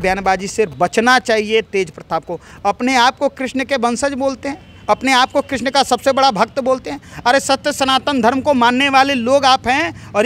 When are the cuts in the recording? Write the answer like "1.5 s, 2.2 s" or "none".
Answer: none